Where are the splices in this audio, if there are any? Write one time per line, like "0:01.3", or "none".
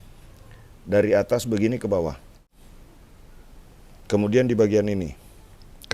0:02.5